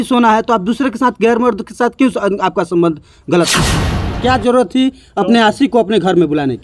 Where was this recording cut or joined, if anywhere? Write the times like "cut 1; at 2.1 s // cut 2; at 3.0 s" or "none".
cut 1; at 4.1 s